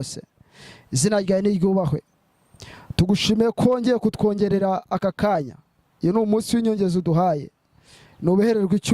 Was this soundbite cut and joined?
no; 0 cuts

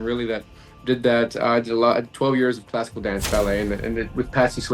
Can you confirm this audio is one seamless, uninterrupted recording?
yes; 0 cuts

